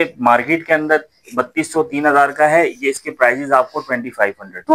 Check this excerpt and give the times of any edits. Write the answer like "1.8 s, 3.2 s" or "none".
none